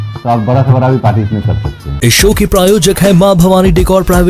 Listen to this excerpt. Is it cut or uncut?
uncut